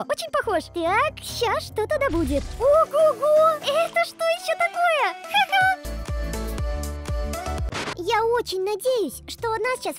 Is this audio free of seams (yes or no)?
no